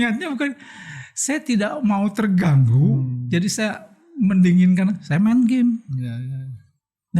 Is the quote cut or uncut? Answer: uncut